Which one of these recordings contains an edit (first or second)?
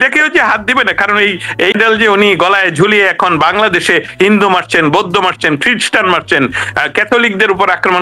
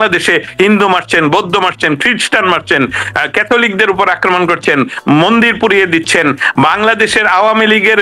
first